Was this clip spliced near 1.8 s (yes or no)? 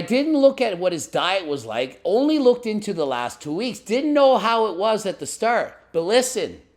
no